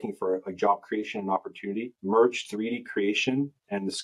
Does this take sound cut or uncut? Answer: uncut